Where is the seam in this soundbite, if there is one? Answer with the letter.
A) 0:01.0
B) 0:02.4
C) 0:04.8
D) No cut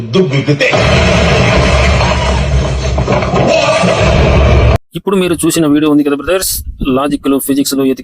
C